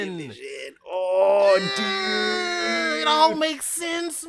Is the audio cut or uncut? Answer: uncut